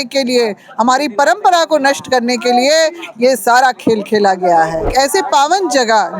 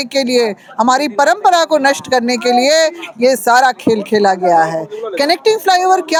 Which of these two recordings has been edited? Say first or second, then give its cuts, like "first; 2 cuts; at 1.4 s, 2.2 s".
first; 1 cut; at 4.9 s